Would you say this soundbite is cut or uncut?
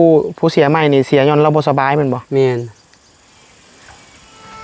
uncut